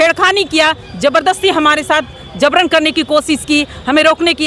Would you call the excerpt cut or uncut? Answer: uncut